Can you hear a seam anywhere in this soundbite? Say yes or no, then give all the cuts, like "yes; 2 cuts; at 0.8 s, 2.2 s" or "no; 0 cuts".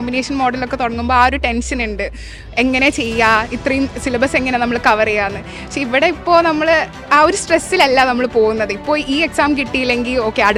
no; 0 cuts